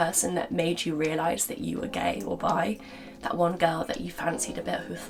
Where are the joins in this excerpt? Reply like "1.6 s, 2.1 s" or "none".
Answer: none